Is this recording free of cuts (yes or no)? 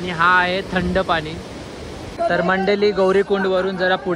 no